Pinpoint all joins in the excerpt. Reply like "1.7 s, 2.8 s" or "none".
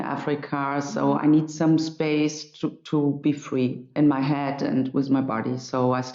3.8 s